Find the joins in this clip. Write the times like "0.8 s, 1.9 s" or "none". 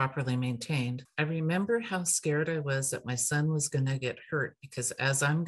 1.0 s